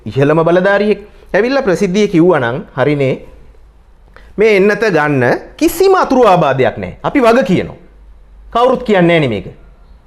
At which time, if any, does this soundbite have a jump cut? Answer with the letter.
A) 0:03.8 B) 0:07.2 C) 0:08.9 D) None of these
D